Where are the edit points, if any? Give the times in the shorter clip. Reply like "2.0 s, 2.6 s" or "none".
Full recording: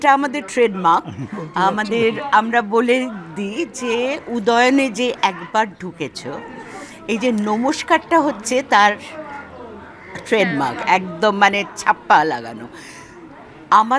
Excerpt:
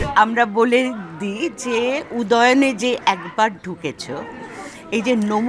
none